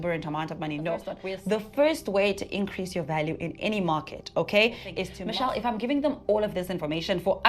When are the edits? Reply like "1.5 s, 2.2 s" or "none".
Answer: 1.2 s, 5.1 s